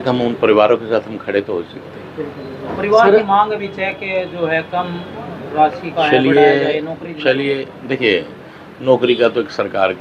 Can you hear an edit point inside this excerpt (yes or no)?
no